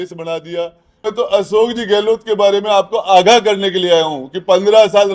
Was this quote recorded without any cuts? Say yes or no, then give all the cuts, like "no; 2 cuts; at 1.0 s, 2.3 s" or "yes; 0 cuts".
no; 1 cut; at 1.1 s